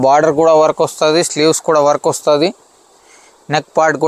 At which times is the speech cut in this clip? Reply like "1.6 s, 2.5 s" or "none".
none

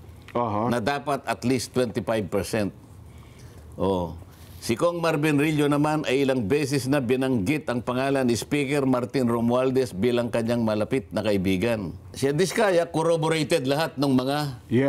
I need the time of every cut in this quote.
12.0 s

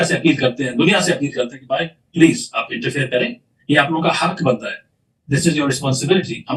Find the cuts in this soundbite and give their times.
none

